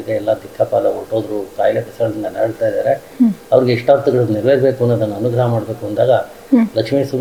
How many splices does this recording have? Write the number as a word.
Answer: zero